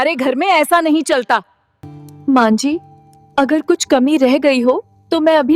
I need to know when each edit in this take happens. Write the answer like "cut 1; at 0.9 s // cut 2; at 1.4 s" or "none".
cut 1; at 1.4 s